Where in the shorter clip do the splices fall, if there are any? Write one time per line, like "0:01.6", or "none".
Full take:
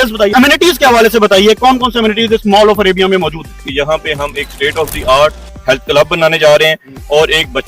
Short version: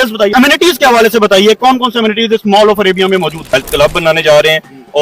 0:03.4